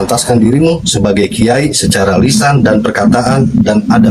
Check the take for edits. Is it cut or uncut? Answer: uncut